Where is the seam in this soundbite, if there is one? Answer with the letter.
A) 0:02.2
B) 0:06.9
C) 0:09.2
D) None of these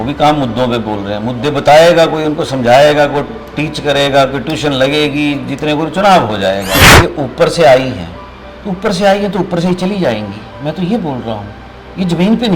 B